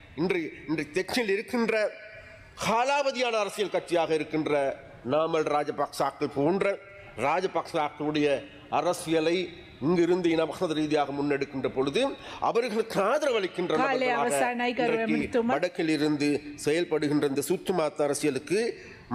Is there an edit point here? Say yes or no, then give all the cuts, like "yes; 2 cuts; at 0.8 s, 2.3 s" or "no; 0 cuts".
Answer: no; 0 cuts